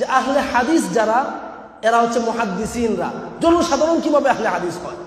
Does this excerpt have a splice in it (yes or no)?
no